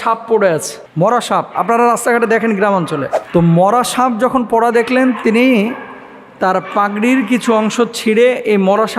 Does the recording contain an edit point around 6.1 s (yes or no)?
no